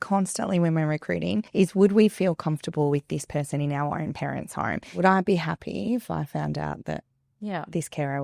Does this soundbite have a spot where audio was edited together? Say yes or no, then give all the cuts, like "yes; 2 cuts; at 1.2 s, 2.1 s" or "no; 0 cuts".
yes; 2 cuts; at 1.5 s, 4.9 s